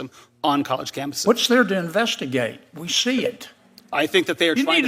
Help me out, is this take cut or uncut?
cut